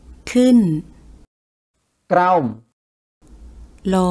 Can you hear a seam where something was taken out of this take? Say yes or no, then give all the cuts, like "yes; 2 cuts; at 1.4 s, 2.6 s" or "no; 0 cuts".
no; 0 cuts